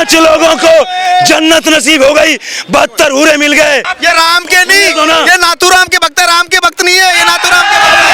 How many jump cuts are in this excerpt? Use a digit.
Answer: 1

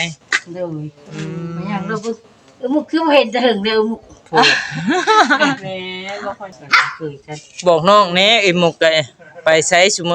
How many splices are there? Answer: 1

